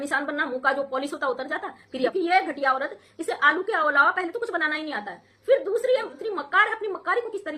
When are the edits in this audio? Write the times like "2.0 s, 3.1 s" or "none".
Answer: 2.1 s

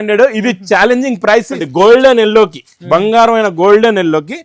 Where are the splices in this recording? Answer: 1.7 s

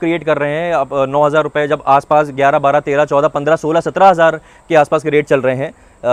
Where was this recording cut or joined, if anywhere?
none

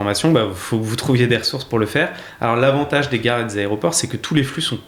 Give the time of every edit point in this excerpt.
none

